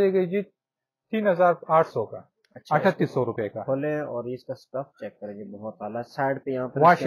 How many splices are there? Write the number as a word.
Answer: zero